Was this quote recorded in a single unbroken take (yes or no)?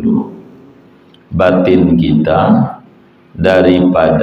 yes